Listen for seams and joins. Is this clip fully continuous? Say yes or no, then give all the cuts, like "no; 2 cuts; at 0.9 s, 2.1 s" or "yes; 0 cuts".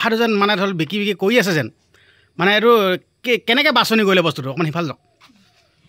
yes; 0 cuts